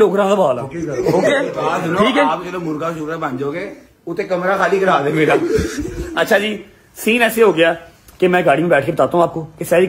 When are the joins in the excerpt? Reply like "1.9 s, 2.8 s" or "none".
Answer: none